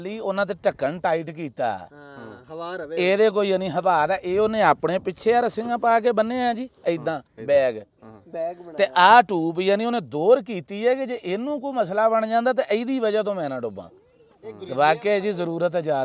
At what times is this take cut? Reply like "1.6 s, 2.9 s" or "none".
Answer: none